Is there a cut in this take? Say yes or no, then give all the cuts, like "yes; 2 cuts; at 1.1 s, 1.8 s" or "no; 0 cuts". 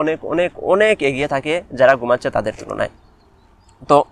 no; 0 cuts